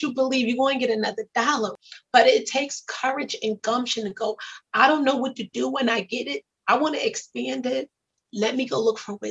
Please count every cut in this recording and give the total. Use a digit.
0